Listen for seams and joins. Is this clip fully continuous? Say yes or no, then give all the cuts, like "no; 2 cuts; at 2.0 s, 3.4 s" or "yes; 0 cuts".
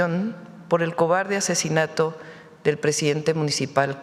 yes; 0 cuts